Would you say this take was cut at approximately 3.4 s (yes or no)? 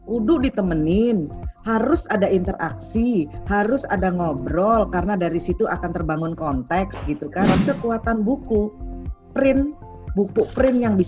no